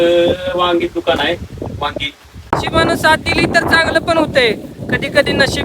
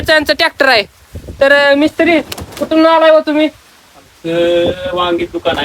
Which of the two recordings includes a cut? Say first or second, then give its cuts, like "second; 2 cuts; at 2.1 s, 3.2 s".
first; 1 cut; at 2.5 s